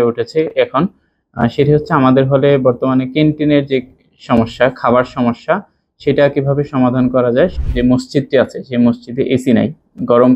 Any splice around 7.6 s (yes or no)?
yes